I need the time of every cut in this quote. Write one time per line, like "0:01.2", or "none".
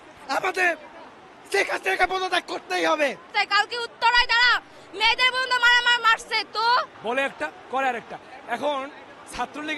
0:03.3
0:07.0